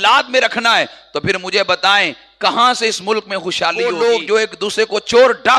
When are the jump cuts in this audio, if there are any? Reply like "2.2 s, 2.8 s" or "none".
3.8 s